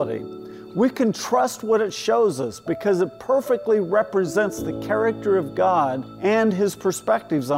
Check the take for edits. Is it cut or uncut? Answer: cut